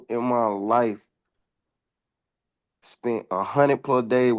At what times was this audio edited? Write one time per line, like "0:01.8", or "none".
none